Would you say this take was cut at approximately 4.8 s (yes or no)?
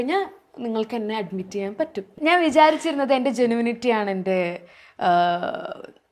no